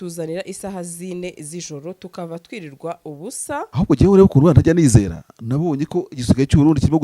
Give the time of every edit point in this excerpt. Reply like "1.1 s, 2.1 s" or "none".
3.7 s